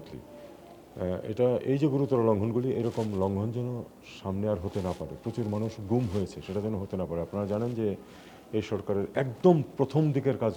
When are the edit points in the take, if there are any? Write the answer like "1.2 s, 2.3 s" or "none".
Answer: none